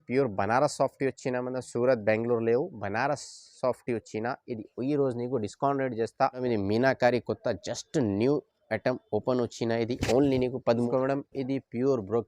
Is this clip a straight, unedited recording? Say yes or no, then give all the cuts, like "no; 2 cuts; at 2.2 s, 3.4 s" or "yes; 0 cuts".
no; 2 cuts; at 6.4 s, 10.8 s